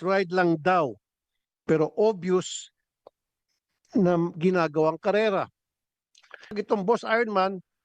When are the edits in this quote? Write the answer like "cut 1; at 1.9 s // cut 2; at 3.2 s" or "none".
cut 1; at 6.5 s

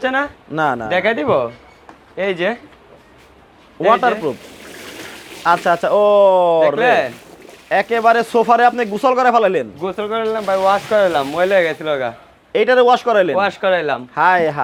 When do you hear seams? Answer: none

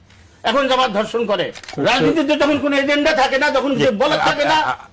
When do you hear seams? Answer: cut 1; at 1.6 s

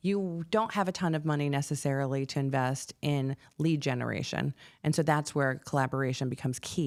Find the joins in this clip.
none

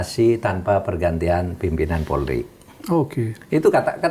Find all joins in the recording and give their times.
none

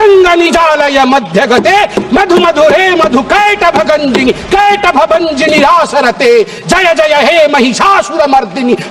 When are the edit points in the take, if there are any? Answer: none

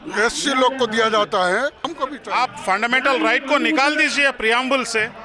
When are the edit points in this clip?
cut 1; at 2.0 s

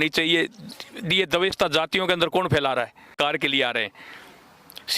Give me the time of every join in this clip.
cut 1; at 3.1 s

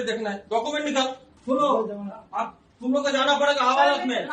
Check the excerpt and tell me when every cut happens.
cut 1; at 1.3 s

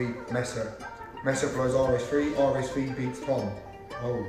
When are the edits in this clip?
none

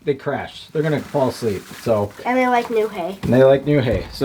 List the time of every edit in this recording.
none

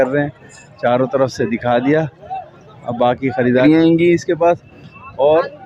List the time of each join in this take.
cut 1; at 3.6 s

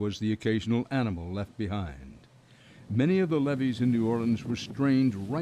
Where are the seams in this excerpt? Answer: cut 1; at 4.5 s

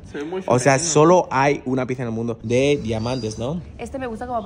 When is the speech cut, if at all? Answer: cut 1; at 2.4 s

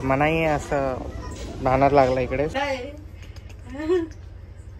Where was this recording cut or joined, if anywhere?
cut 1; at 2.5 s

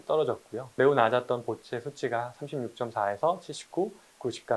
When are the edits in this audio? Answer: none

